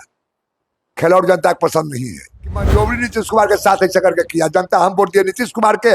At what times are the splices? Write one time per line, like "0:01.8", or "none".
0:02.7